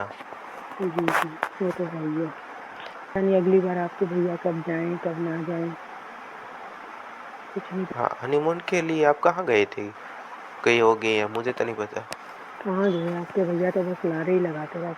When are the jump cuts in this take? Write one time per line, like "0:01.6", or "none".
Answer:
0:01.4
0:03.1